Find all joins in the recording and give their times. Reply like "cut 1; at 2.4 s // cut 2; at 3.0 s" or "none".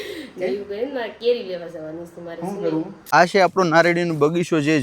cut 1; at 3.1 s